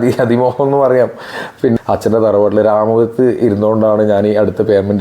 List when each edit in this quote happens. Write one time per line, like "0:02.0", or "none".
0:01.8

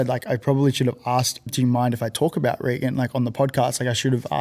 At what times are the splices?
0:01.5

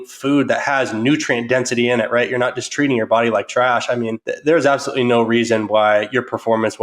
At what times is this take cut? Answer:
0:04.2

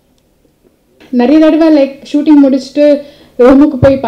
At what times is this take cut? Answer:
0:01.0

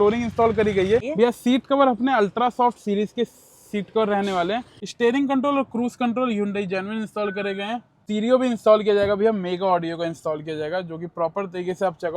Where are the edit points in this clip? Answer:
0:01.1
0:04.7
0:08.0

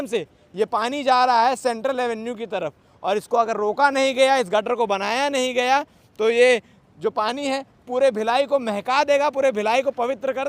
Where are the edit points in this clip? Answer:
none

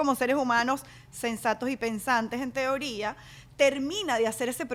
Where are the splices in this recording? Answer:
none

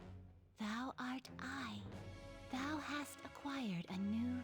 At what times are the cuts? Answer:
none

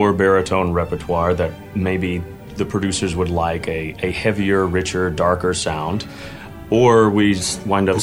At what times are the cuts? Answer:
0:01.6
0:02.5

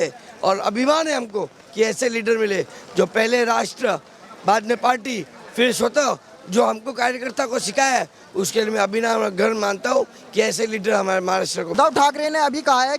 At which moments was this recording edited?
0:11.7

